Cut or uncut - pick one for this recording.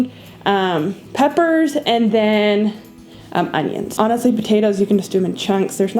cut